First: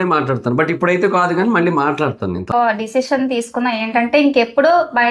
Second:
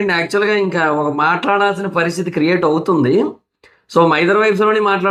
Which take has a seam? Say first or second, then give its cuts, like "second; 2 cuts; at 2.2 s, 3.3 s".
first; 1 cut; at 2.5 s